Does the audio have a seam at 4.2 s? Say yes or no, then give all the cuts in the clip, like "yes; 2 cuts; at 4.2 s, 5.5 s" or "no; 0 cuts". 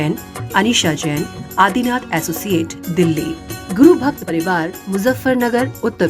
yes; 1 cut; at 4.2 s